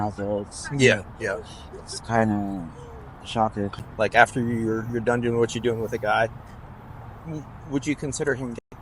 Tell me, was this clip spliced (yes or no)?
yes